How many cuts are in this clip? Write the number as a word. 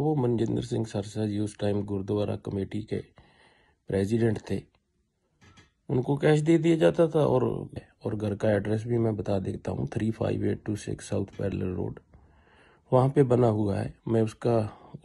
one